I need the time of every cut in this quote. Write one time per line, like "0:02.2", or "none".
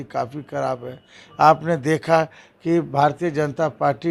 none

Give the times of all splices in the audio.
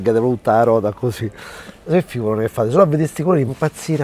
0:01.9

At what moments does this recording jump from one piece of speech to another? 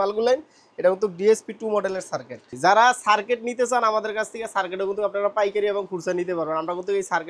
0:02.5

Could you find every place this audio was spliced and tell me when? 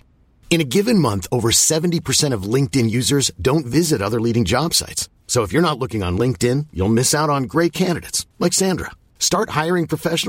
none

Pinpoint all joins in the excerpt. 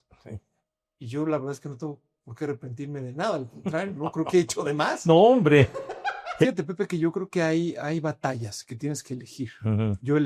0:06.4

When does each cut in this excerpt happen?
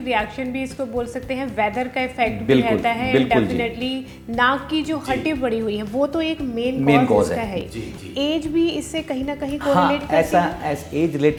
none

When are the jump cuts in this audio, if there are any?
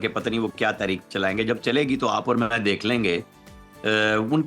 none

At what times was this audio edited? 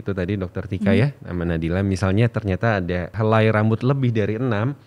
0:03.1

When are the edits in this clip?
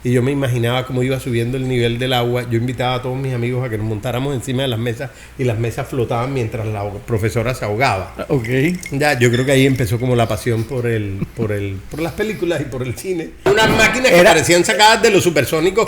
0:13.5

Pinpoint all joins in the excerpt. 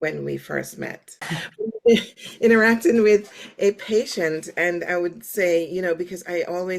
0:01.2

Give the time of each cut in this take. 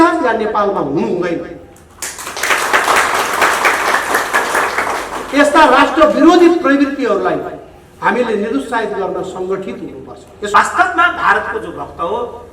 0:10.5

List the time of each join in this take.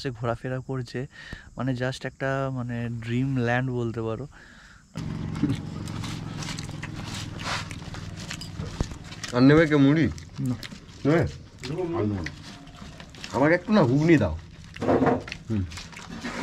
0:05.0

